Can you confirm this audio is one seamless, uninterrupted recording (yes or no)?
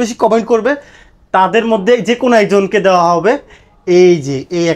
yes